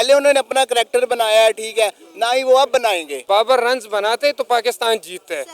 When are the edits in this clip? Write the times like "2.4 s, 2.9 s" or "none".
3.2 s